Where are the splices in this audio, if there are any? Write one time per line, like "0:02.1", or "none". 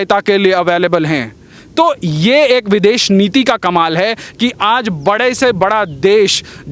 none